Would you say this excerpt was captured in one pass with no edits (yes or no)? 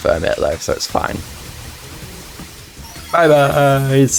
yes